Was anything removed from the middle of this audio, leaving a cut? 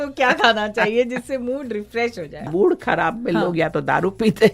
yes; 1 cut; at 2.5 s

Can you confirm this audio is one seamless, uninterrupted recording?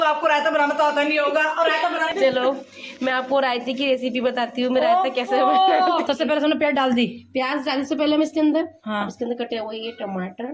no; 2 cuts; at 2.1 s, 6.0 s

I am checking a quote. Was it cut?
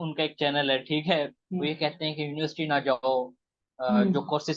yes; 1 cut; at 1.4 s

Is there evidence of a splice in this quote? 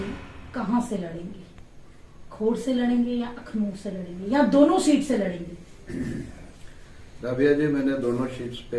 no; 0 cuts

